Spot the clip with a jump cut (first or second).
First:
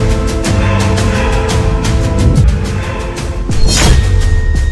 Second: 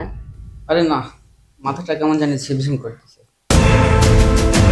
first